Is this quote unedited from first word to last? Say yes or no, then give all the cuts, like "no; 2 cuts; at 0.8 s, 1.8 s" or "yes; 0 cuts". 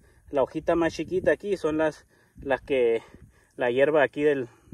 yes; 0 cuts